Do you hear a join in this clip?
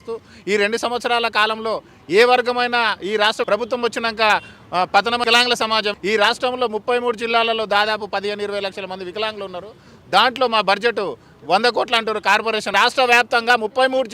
yes; 2 cuts; at 5.5 s, 12.7 s

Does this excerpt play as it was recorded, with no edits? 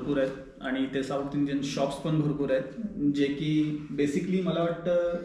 yes; 0 cuts

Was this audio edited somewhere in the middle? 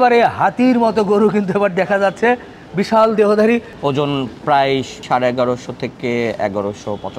yes; 2 cuts; at 3.7 s, 5.0 s

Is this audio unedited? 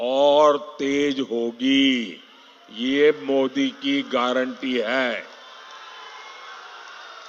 yes; 0 cuts

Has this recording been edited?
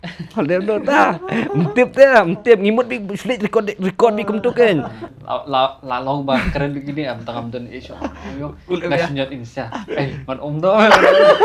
yes; 1 cut; at 5.2 s

